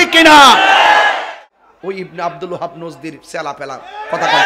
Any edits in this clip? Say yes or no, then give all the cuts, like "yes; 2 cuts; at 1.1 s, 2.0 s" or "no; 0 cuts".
yes; 1 cut; at 1.3 s